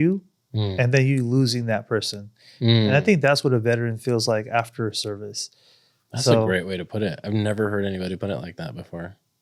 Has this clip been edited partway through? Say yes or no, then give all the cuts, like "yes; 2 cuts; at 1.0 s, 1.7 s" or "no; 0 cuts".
no; 0 cuts